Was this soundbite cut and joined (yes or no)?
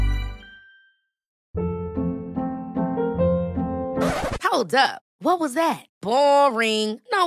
yes